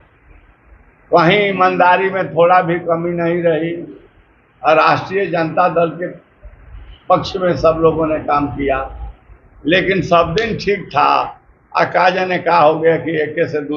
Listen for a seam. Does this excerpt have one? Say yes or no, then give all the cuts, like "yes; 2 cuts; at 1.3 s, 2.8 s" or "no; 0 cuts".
no; 0 cuts